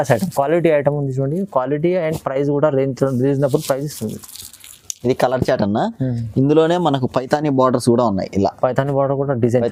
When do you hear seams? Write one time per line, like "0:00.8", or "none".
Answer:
none